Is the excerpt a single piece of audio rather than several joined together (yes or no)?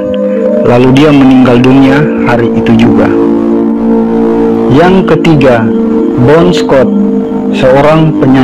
yes